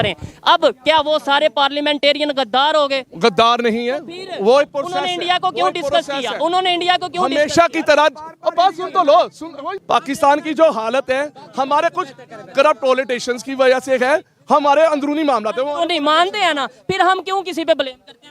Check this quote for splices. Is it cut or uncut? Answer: cut